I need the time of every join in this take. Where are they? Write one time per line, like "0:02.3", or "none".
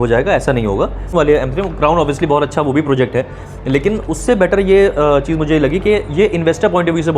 0:01.1